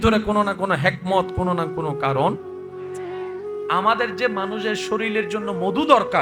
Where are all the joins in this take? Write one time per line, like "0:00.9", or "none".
none